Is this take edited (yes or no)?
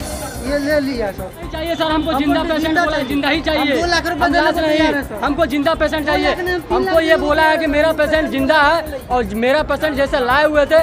yes